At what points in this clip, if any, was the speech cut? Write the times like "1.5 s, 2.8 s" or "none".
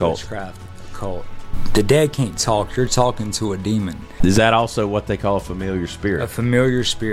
1.5 s, 4.2 s